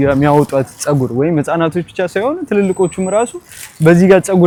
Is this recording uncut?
yes; 0 cuts

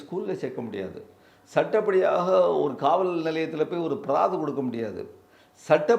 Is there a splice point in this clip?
no; 0 cuts

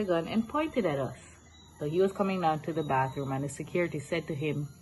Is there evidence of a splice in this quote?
yes; 1 cut; at 1.6 s

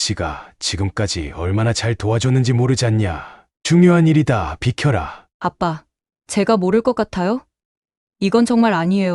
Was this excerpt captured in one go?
no; 1 cut; at 5.2 s

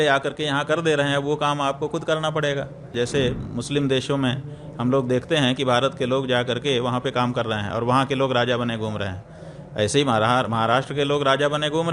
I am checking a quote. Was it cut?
yes; 1 cut; at 2.9 s

